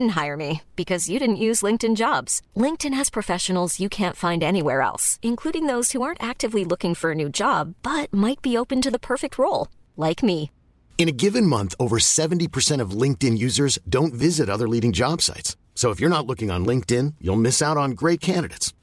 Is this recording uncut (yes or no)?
yes